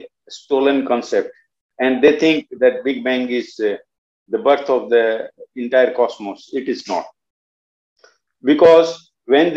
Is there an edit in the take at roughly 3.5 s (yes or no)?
no